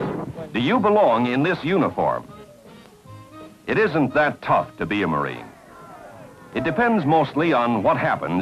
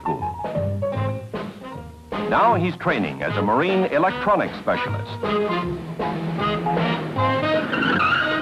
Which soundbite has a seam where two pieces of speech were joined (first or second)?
second